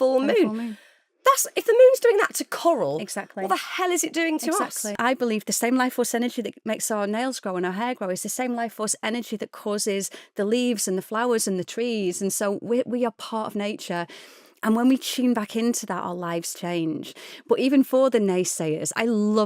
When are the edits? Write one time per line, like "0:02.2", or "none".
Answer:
0:05.0